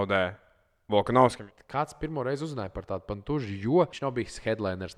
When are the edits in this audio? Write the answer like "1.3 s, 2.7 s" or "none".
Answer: 1.4 s, 3.9 s